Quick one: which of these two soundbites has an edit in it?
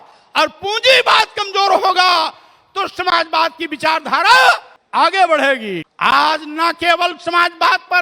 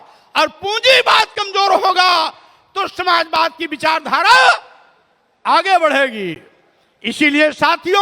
first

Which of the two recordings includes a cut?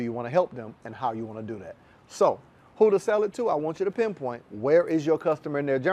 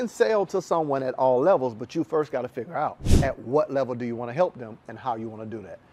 second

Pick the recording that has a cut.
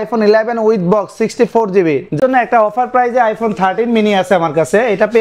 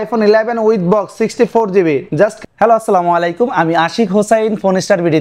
first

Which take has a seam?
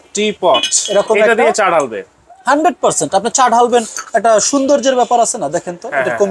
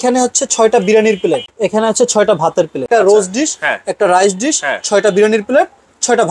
second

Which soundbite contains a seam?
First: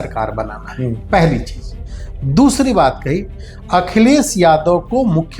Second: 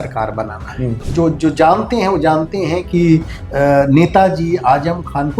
second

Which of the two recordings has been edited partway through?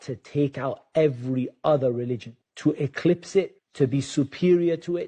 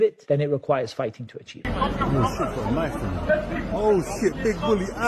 second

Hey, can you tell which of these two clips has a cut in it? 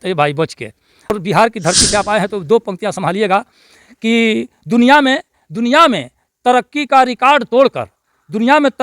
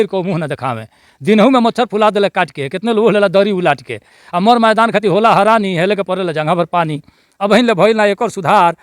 first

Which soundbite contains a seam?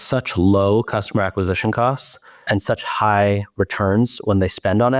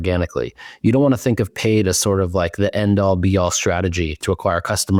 first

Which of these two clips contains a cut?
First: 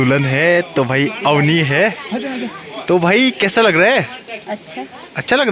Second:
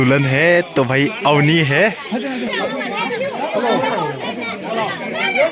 second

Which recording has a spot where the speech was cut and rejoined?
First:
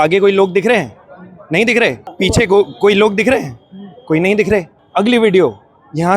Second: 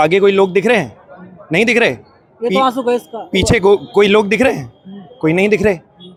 first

